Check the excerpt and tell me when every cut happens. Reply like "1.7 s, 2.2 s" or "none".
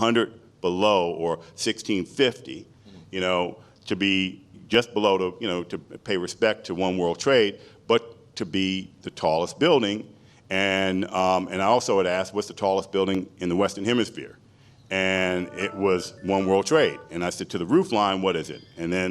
none

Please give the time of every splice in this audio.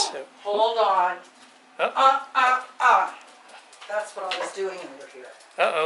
none

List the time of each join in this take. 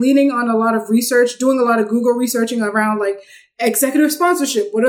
none

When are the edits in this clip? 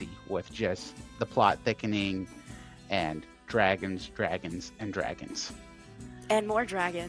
none

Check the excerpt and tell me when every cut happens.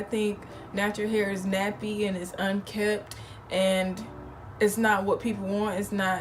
none

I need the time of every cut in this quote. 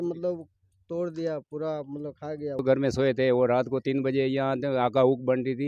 2.6 s

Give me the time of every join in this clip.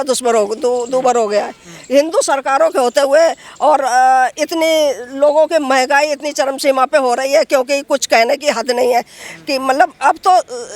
none

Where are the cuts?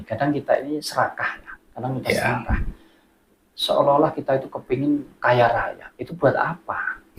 none

